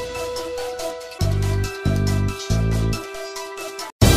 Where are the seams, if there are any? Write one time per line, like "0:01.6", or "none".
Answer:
0:00.9
0:01.2